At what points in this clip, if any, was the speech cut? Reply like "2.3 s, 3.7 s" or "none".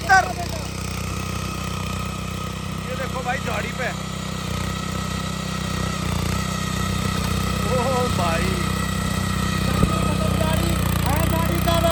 none